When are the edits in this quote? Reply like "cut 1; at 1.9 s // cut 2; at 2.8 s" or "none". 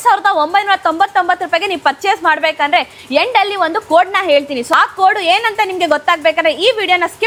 none